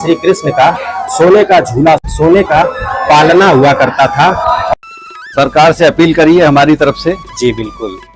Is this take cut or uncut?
cut